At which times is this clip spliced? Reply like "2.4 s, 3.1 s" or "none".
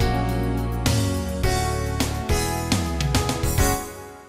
1.4 s